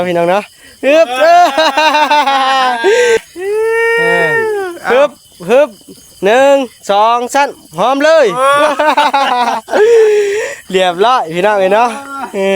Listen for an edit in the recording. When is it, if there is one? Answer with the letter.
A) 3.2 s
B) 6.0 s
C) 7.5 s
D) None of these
A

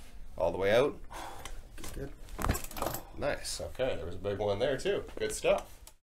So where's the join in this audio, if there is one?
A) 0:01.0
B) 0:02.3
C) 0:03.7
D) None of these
D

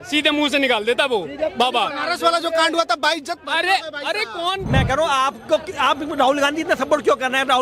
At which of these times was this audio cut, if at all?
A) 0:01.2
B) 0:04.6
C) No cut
B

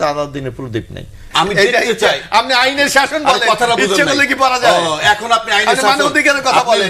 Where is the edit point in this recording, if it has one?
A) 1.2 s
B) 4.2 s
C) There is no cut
A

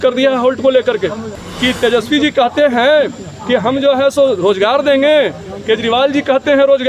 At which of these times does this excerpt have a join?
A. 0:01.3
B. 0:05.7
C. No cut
A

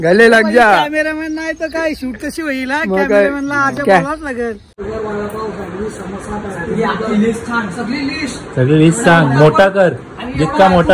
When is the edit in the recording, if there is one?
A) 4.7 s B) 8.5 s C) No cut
A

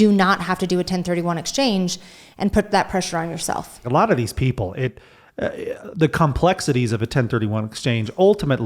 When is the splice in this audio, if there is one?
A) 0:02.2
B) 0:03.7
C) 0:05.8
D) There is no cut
B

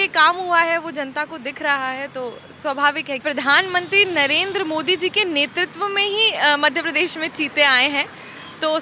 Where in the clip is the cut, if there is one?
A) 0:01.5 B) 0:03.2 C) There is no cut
B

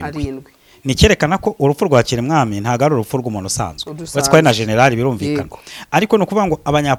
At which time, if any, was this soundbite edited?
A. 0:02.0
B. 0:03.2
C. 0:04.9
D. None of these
D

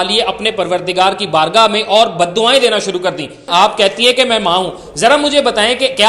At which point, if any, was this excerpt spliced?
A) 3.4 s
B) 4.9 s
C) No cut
A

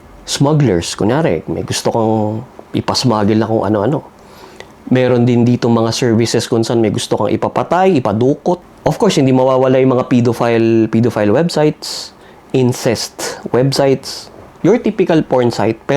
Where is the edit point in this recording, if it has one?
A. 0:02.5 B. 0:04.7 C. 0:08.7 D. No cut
D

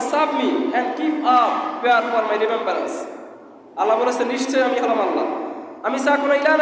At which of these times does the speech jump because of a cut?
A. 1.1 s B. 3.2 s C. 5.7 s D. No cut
D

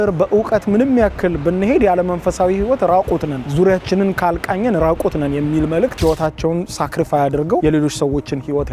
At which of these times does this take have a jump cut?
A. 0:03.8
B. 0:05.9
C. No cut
B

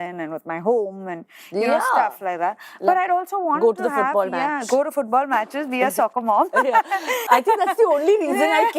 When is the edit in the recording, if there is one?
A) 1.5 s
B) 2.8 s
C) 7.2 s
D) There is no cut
C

